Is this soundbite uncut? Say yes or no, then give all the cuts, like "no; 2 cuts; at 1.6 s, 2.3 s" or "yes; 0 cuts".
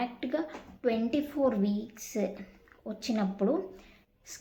yes; 0 cuts